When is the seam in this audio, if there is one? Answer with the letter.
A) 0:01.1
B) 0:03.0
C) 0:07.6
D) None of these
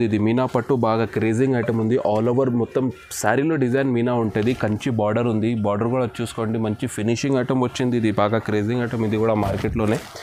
D